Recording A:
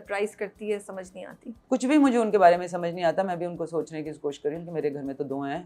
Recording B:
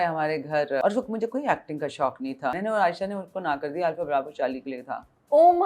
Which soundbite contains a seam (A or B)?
B